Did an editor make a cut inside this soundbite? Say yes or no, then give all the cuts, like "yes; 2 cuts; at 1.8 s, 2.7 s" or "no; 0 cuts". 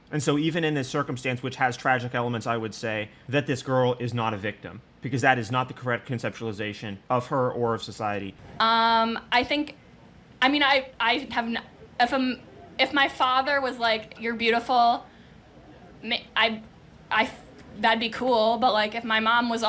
yes; 1 cut; at 8.4 s